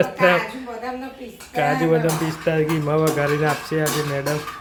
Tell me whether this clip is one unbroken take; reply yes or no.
yes